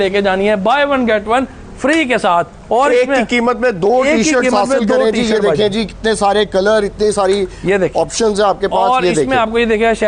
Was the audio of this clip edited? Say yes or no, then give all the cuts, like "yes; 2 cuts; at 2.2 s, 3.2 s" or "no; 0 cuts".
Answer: no; 0 cuts